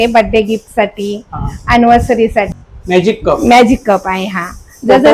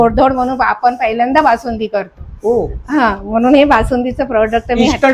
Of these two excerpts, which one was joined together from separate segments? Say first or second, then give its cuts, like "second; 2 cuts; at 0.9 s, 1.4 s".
first; 1 cut; at 2.6 s